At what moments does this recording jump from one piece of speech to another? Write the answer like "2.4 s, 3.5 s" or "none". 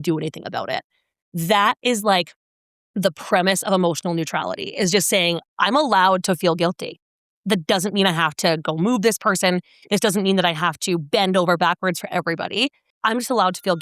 12.9 s